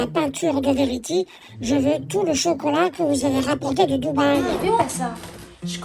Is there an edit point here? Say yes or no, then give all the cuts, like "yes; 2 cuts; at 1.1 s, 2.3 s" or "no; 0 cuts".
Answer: yes; 1 cut; at 4.8 s